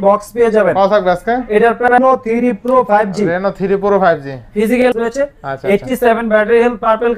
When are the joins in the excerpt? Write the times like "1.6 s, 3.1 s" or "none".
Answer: 2.0 s, 4.9 s